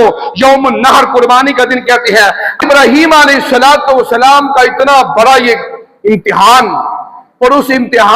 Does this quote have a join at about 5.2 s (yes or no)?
no